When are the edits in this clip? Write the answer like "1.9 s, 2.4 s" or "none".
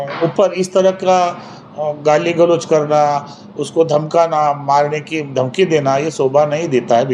none